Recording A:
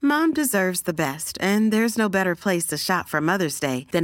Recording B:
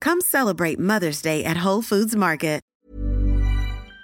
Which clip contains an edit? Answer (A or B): B